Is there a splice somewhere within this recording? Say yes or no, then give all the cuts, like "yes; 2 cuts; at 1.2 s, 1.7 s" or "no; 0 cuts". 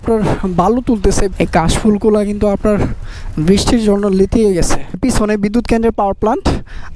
yes; 2 cuts; at 1.3 s, 5.0 s